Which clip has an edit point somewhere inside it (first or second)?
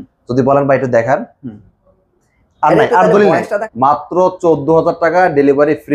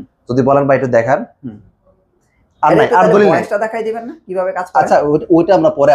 first